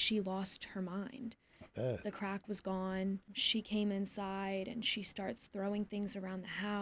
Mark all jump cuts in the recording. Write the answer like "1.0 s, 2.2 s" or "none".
3.4 s